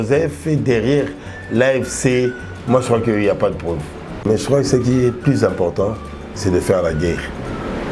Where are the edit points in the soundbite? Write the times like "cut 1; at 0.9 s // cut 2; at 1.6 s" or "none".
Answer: cut 1; at 4.2 s

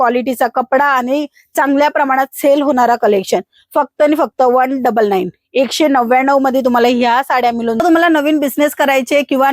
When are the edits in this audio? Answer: cut 1; at 7.8 s

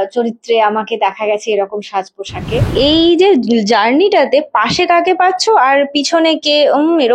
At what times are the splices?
cut 1; at 2.7 s

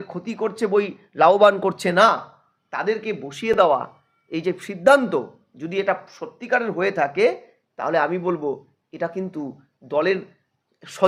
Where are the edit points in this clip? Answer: none

